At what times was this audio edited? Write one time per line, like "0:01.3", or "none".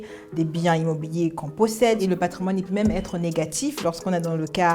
0:02.0